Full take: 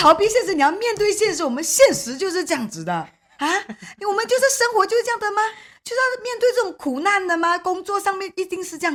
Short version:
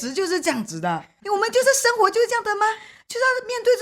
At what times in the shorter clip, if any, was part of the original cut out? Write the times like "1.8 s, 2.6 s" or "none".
1.1 s